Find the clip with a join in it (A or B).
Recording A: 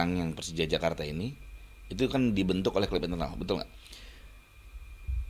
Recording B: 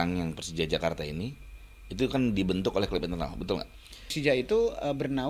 B